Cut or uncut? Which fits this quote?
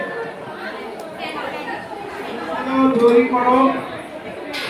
uncut